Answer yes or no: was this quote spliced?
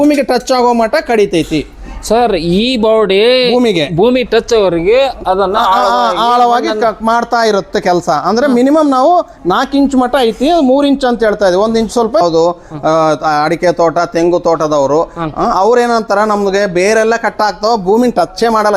yes